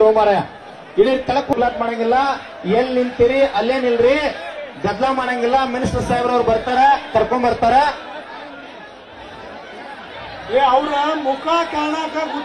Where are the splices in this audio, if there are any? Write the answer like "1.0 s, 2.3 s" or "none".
1.5 s